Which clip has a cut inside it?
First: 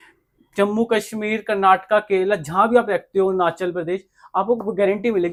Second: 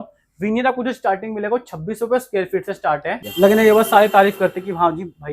second; 1 cut; at 3.2 s

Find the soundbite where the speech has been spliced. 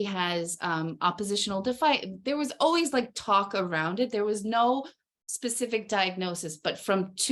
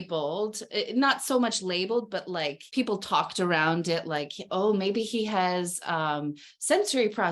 second; 1 cut; at 2.6 s

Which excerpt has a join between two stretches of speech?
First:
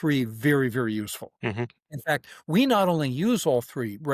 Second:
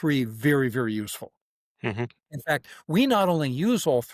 first; 1 cut; at 1.2 s

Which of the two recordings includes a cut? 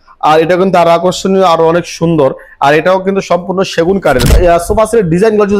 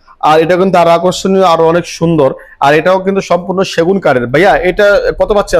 first; 1 cut; at 4.3 s

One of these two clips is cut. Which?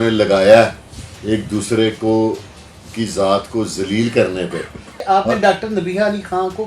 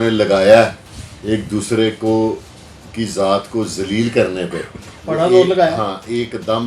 first; 1 cut; at 4.9 s

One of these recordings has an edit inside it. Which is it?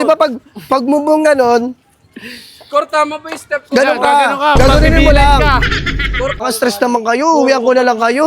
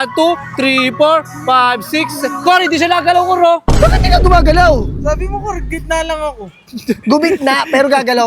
first; 1 cut; at 6.4 s

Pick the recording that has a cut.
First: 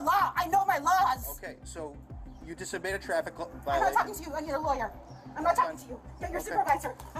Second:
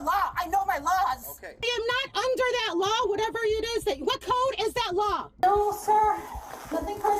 second; 2 cuts; at 1.6 s, 5.3 s

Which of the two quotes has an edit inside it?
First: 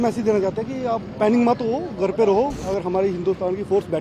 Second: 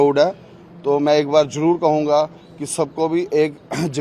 first; 1 cut; at 2.6 s

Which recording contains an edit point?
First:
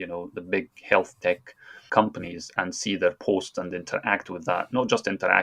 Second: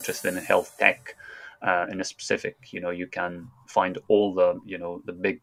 first; 1 cut; at 1.9 s

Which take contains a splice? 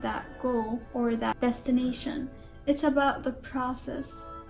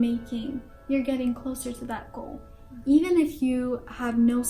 first; 1 cut; at 1.2 s

